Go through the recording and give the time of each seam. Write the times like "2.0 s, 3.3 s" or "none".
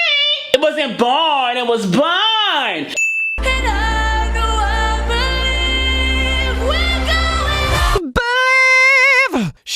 3.0 s, 6.5 s, 8.0 s